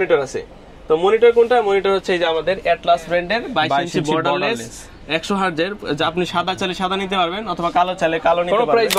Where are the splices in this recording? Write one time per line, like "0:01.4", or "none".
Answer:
none